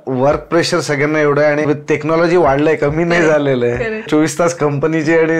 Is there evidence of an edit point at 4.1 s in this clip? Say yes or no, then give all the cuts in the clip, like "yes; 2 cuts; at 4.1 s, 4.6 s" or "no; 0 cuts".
yes; 2 cuts; at 1.6 s, 4.1 s